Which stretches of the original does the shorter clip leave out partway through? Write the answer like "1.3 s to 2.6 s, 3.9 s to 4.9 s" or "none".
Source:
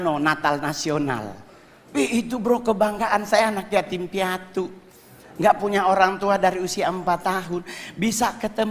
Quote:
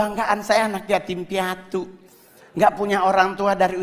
none